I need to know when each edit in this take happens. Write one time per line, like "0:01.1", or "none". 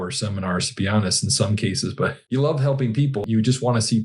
0:02.2
0:03.2